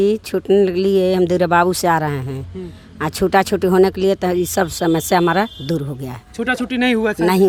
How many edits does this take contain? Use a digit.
0